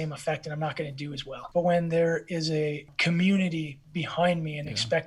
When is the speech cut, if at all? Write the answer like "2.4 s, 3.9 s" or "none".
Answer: 1.3 s, 2.9 s